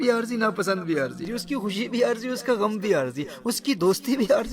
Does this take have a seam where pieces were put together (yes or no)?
yes